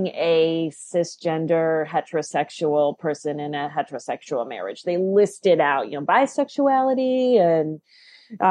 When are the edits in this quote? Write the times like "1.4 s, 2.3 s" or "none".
none